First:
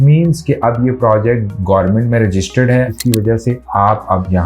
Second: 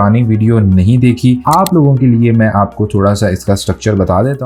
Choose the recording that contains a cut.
first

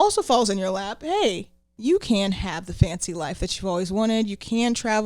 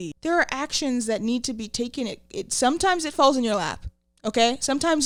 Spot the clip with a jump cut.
first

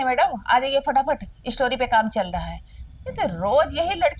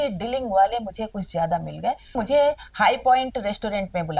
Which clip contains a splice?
second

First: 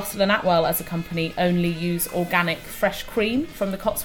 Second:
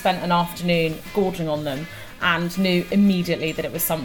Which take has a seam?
second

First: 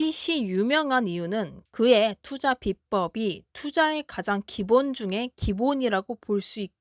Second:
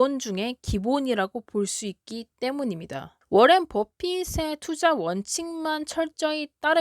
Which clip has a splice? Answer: second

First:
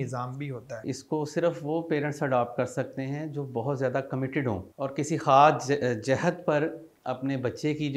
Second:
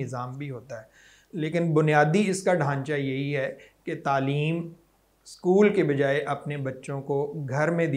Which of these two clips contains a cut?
first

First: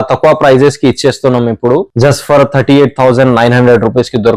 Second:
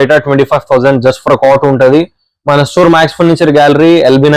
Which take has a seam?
first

